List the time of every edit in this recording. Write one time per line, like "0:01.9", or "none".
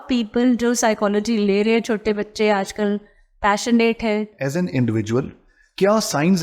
0:04.4